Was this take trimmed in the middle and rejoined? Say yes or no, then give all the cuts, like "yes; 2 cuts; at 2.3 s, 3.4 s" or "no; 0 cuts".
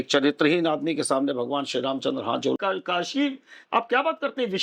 yes; 1 cut; at 2.6 s